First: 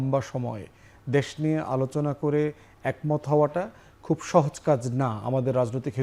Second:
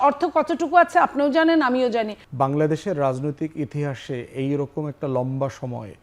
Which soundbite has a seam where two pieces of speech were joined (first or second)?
second